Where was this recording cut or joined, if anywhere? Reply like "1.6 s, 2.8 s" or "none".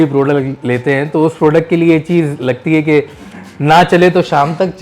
none